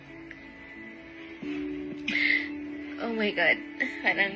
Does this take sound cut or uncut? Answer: uncut